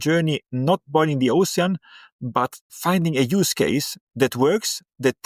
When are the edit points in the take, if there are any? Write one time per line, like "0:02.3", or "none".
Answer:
none